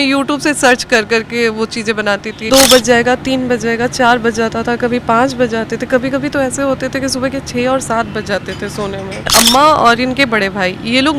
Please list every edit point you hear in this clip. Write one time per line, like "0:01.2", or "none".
0:02.3
0:09.3